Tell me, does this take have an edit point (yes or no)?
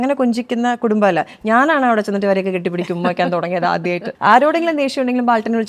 yes